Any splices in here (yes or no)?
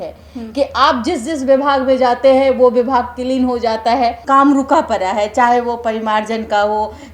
yes